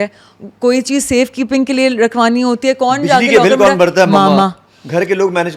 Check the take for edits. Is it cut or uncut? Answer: uncut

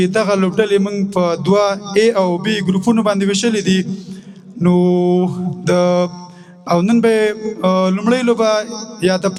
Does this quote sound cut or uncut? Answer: uncut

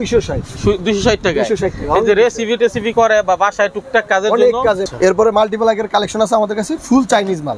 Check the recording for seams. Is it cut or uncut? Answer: cut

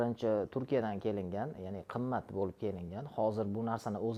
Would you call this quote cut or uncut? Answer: uncut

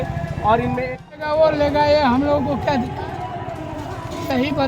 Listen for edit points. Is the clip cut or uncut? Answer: cut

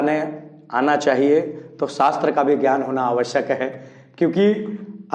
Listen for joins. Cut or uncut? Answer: uncut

